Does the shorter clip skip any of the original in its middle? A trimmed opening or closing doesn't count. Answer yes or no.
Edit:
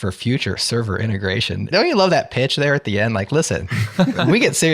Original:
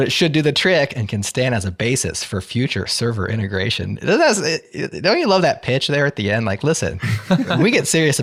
yes